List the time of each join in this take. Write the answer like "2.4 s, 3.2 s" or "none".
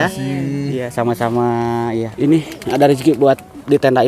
2.1 s